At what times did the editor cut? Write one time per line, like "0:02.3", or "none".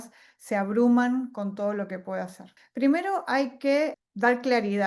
0:02.5
0:04.0